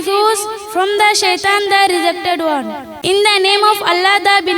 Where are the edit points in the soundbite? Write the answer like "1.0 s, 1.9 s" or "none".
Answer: 2.8 s